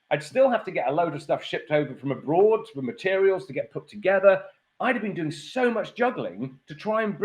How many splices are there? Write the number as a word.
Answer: one